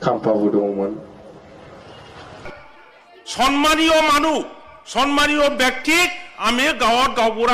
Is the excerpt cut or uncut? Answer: cut